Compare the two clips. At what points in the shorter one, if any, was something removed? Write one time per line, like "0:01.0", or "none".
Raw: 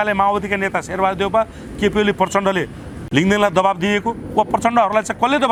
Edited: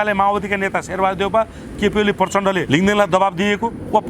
0:02.6